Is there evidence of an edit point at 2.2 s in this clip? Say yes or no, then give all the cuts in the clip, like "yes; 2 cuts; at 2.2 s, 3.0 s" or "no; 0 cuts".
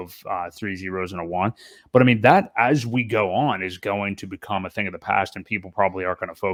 no; 0 cuts